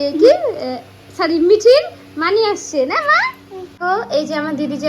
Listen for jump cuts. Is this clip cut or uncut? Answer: cut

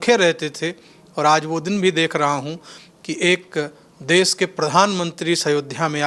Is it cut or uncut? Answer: uncut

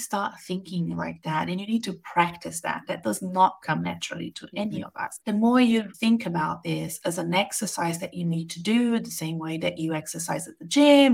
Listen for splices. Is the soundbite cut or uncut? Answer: cut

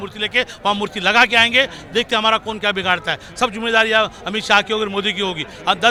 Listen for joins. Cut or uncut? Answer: uncut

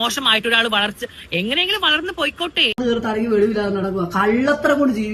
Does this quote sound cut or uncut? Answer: cut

